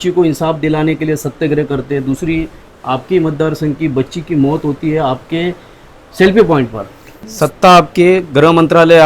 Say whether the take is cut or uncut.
cut